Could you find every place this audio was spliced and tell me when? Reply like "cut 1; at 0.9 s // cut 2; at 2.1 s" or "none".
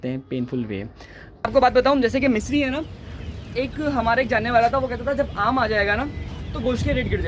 cut 1; at 1.5 s

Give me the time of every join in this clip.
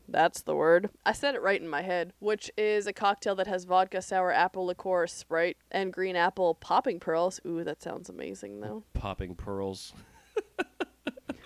cut 1; at 2.1 s // cut 2; at 5.6 s

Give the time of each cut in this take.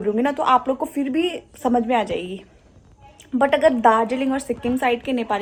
none

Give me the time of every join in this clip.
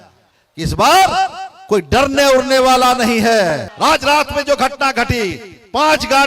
cut 1; at 3.7 s

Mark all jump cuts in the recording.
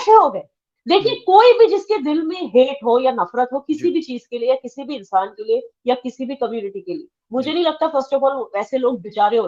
none

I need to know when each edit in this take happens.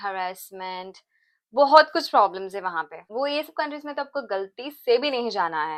none

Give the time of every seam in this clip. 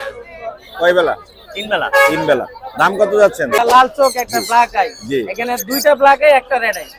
cut 1; at 3.6 s

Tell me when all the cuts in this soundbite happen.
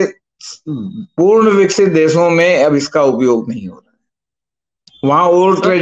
none

